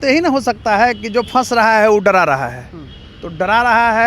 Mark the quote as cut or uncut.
uncut